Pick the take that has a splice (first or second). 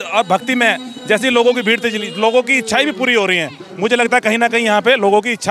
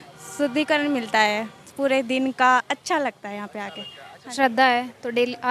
second